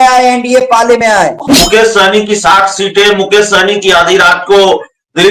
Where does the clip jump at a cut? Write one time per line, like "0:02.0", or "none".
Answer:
0:01.5

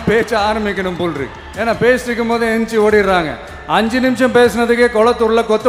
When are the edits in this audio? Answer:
none

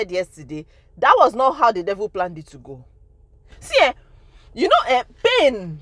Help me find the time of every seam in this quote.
0:03.5

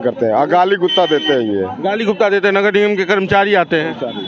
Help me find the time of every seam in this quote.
none

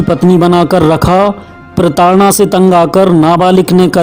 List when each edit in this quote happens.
none

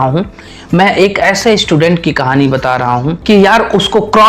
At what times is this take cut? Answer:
0:03.1

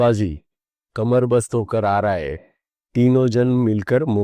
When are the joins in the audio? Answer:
none

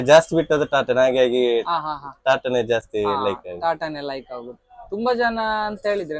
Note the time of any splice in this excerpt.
none

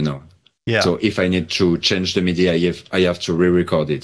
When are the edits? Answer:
none

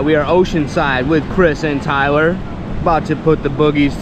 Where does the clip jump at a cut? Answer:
none

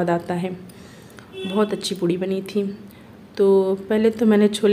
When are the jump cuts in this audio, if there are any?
none

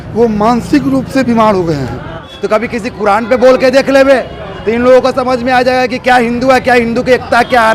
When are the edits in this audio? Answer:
0:02.3

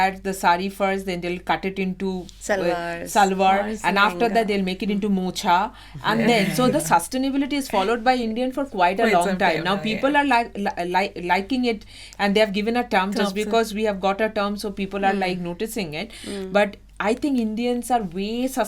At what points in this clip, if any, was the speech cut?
none

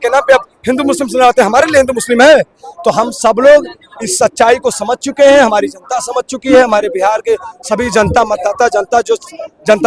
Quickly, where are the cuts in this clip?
none

